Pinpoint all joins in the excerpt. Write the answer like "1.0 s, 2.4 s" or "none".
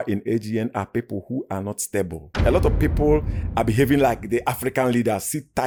none